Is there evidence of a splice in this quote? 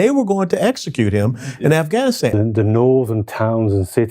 yes; 1 cut; at 2.3 s

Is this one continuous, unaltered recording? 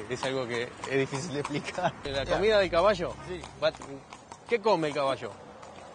no; 1 cut; at 2.0 s

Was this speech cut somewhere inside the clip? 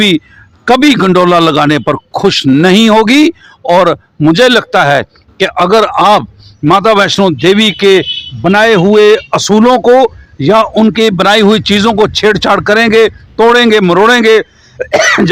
no; 0 cuts

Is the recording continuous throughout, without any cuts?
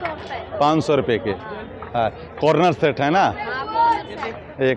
yes; 0 cuts

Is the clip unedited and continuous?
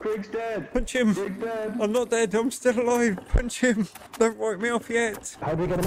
yes; 0 cuts

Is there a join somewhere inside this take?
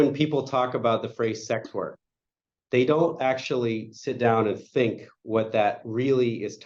no; 0 cuts

